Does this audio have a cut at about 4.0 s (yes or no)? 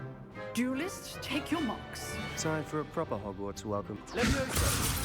yes